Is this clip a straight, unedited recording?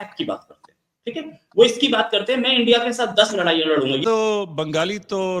no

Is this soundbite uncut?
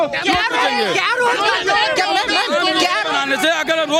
yes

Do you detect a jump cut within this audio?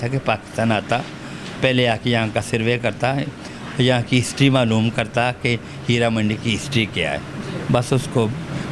no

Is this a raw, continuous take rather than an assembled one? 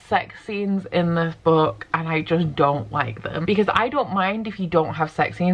yes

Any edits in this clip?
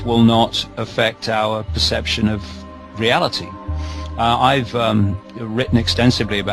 no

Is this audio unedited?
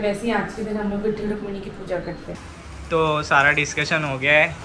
no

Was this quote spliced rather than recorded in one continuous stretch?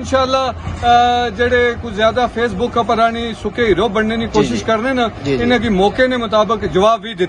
no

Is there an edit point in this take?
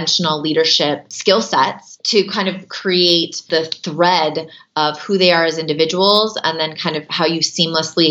yes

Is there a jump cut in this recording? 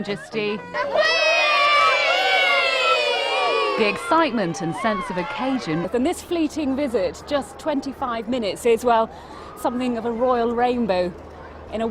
no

